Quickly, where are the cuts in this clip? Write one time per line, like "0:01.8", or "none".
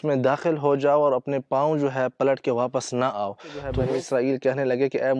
0:03.6